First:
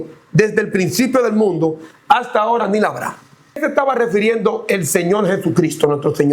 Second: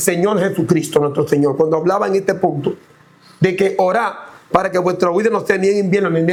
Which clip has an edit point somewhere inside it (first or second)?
first